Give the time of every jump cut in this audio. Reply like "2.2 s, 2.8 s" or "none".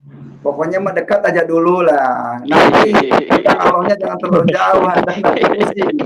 none